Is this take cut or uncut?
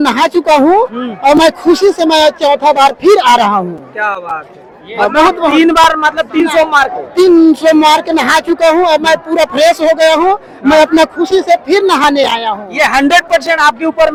uncut